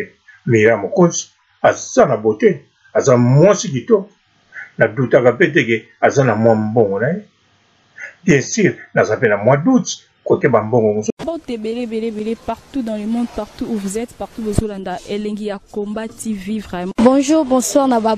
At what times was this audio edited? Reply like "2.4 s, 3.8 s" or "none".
11.0 s